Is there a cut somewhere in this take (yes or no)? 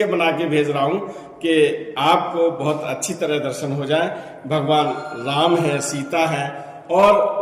no